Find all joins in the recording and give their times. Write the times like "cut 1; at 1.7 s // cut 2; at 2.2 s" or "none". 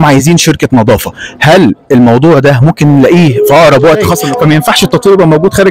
cut 1; at 4.2 s